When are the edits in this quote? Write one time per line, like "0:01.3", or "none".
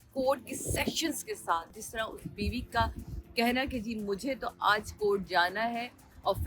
0:01.7